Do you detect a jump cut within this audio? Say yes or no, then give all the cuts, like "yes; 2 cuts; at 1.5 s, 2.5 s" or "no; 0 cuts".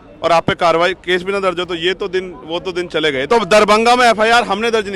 yes; 1 cut; at 3.2 s